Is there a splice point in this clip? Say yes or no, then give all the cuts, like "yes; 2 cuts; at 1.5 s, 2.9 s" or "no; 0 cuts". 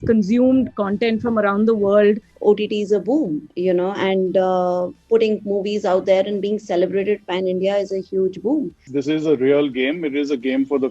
yes; 2 cuts; at 2.3 s, 8.9 s